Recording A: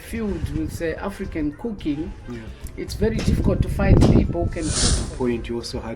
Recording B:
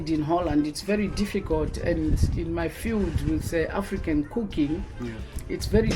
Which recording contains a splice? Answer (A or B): A